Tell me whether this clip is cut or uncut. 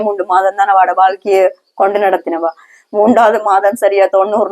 uncut